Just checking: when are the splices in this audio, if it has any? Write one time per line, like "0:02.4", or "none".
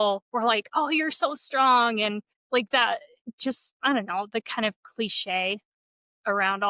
0:02.3